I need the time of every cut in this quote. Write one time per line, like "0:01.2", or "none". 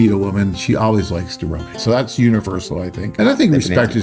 0:01.8
0:03.1

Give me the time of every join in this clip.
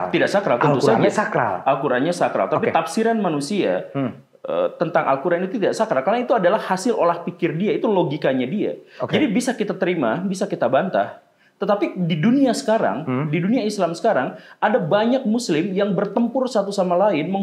none

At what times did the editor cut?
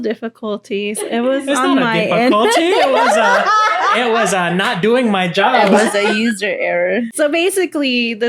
0:07.1

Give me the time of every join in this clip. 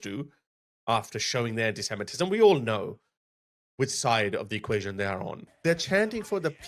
0:05.4

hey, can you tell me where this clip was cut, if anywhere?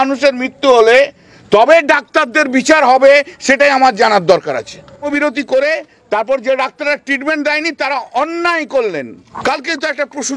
0:05.1
0:09.2

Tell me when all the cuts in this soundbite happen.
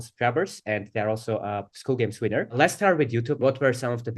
0:02.5
0:03.4

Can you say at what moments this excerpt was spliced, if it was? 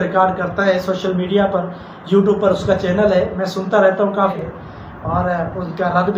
0:04.3

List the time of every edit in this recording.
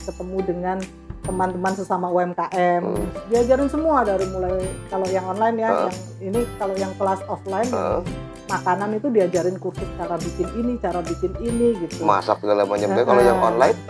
0:03.0

